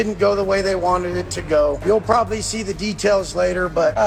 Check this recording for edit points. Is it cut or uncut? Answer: uncut